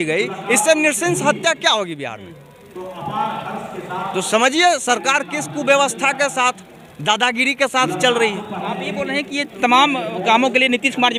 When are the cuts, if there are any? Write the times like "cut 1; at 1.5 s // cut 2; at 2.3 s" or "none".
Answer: none